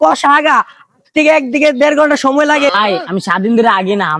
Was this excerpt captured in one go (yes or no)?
no